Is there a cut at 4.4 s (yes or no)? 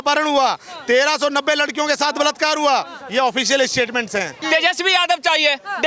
yes